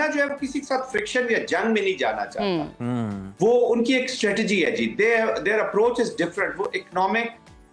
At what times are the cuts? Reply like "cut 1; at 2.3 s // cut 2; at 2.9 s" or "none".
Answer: none